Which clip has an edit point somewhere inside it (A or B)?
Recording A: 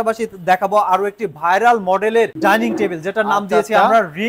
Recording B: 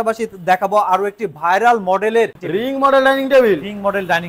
B